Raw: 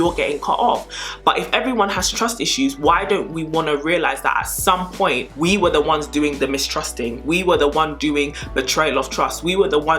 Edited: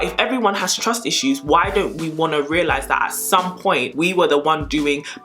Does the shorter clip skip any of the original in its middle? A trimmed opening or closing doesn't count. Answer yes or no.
yes